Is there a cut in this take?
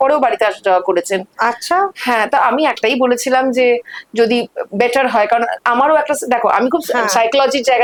no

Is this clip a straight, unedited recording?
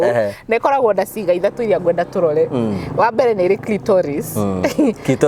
yes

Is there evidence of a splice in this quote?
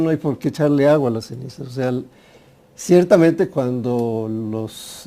no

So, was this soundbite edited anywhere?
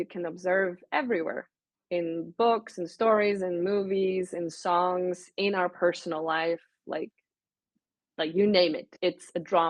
no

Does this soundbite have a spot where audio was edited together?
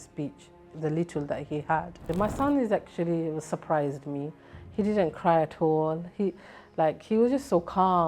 yes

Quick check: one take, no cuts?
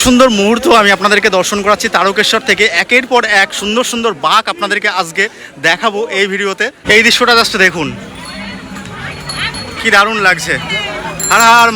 no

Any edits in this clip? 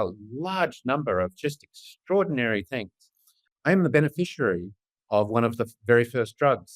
yes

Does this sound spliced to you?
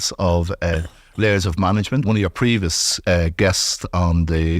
yes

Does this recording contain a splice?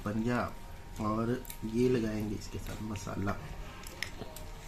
no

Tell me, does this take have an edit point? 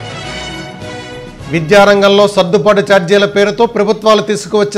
yes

